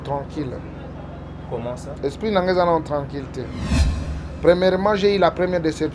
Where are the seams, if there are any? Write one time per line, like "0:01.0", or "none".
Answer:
0:03.8